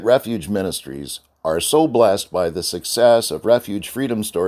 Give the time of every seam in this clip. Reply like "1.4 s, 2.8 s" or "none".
none

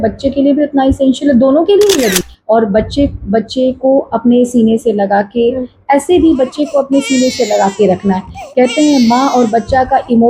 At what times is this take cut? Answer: 2.2 s

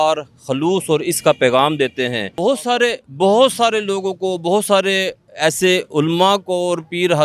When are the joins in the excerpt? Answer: 2.2 s

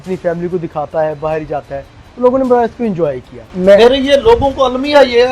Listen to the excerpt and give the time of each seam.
3.4 s

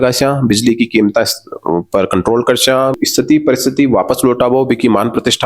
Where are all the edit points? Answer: 3.0 s

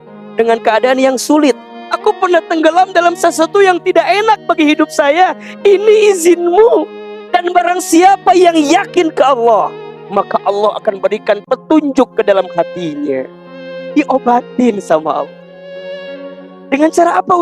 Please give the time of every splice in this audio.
1.7 s

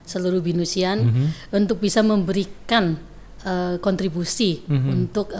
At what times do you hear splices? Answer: none

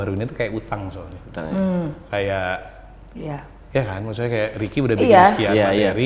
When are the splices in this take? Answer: none

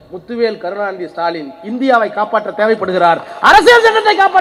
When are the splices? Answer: none

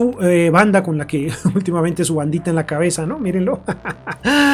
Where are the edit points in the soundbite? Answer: none

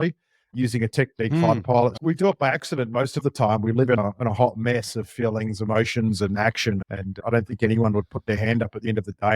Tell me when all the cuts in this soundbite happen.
2.0 s, 4.0 s

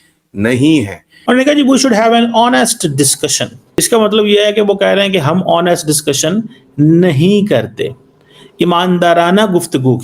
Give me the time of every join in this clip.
1.1 s, 3.8 s

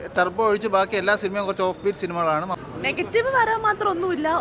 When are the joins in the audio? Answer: 2.6 s

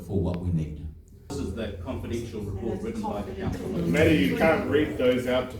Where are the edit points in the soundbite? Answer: 1.3 s, 3.8 s

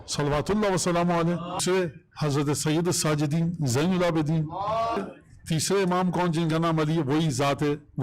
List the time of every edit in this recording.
1.6 s, 5.0 s

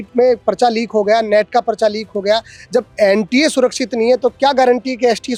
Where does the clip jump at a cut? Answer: none

